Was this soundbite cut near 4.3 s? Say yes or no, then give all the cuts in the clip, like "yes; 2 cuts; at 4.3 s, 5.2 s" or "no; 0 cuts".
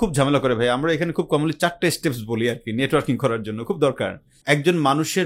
yes; 1 cut; at 4.3 s